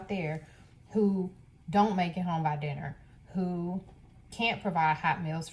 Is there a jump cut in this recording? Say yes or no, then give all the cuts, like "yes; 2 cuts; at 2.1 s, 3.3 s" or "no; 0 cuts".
no; 0 cuts